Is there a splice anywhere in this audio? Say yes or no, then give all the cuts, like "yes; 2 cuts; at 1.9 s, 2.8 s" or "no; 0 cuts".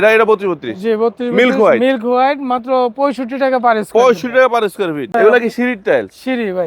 yes; 1 cut; at 5.1 s